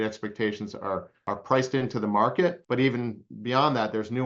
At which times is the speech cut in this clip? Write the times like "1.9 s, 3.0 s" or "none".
1.1 s